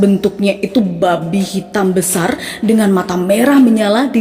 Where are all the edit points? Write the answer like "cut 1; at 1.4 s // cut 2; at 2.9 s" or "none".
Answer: none